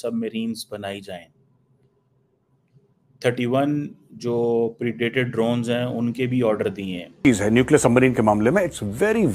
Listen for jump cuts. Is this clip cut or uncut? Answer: cut